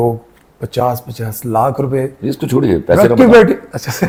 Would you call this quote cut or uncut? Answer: uncut